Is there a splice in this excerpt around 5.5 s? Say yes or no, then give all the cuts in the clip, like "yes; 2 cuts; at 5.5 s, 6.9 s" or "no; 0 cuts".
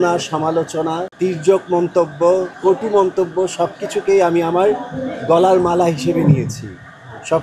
no; 2 cuts; at 1.1 s, 2.5 s